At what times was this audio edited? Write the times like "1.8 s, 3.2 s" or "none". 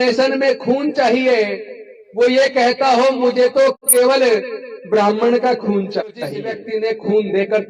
6.6 s